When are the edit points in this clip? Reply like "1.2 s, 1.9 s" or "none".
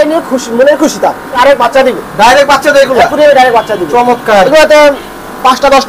1.4 s, 4.5 s